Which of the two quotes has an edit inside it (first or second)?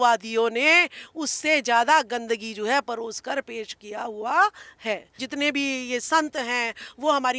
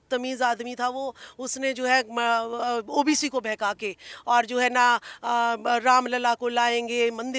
first